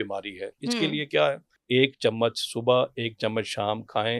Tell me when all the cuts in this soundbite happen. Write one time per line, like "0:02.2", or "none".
0:01.5